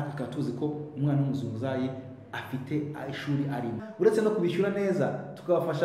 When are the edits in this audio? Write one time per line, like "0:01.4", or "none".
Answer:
0:03.8